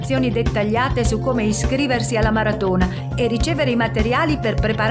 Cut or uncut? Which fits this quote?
uncut